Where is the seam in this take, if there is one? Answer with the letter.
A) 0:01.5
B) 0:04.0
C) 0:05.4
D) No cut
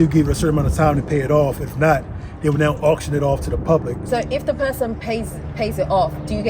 B